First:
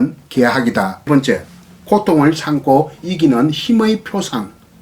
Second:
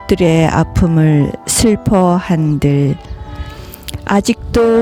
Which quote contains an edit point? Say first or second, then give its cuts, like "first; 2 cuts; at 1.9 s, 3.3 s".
first; 1 cut; at 1.1 s